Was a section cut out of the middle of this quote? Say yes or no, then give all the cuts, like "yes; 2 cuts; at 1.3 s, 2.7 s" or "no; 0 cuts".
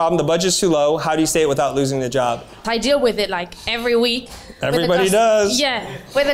yes; 1 cut; at 2.7 s